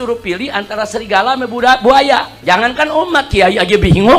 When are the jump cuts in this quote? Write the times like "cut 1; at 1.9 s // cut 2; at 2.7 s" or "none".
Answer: cut 1; at 2.3 s